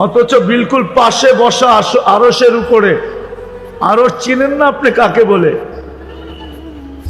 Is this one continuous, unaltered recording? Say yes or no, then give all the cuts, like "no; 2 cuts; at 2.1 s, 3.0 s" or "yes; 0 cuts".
no; 1 cut; at 5.9 s